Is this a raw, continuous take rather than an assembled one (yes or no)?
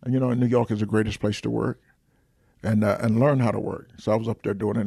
yes